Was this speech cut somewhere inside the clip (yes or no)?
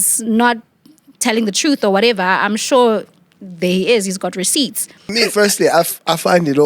yes